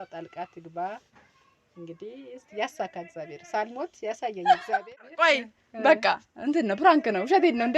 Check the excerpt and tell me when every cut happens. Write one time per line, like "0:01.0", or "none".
0:05.1